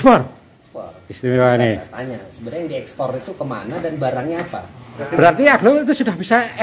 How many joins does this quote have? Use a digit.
1